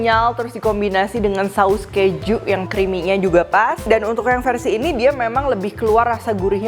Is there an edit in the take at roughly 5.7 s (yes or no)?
no